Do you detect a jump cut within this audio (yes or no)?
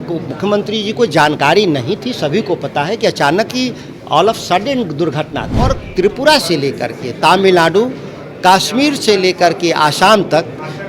yes